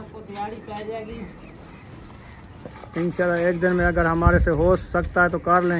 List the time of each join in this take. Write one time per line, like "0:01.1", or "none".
0:02.8